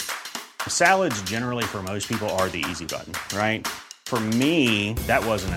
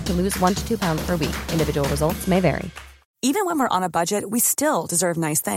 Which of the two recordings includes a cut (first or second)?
second